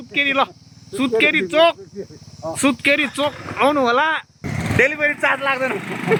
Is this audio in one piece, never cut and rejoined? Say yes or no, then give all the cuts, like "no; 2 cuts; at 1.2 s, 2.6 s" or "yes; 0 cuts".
yes; 0 cuts